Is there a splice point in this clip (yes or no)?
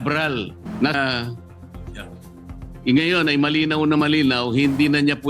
yes